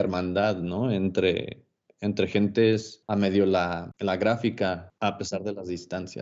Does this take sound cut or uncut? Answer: cut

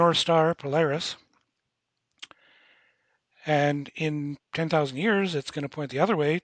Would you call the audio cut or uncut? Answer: uncut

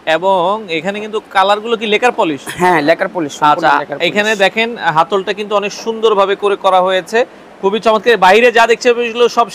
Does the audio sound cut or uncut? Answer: uncut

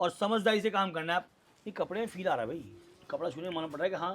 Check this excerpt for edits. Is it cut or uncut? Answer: cut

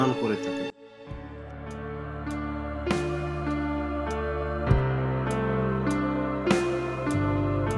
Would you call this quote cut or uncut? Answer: uncut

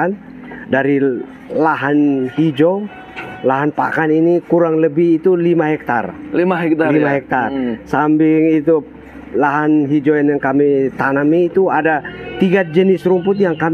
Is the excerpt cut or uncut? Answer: uncut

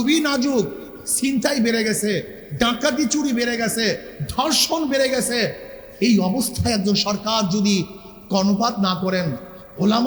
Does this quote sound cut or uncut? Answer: uncut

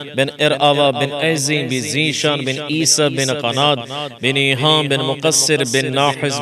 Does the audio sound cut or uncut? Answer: uncut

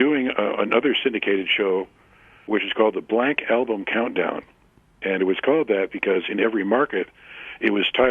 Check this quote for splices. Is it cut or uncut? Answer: uncut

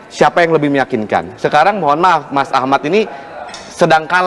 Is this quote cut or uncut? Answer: uncut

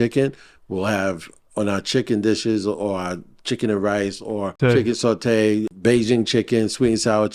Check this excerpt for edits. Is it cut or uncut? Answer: cut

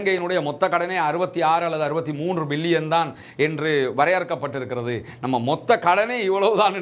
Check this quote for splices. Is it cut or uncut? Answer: uncut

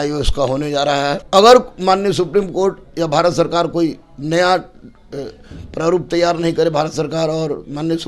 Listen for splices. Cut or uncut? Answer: cut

